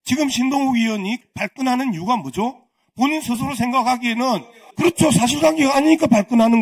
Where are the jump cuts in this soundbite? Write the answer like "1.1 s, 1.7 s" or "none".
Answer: 1.2 s, 4.6 s